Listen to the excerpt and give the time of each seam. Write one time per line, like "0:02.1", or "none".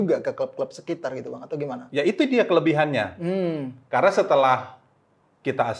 none